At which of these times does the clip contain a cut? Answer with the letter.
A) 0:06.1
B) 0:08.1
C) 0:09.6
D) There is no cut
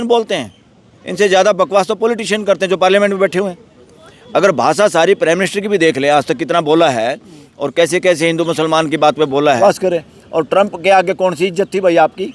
C